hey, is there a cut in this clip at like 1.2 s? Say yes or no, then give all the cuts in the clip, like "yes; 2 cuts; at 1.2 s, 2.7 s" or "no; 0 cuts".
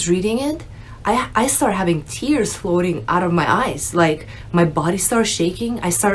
no; 0 cuts